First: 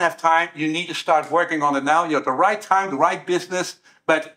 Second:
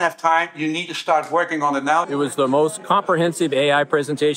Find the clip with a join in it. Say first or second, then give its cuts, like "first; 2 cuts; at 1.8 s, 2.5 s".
second; 1 cut; at 2.1 s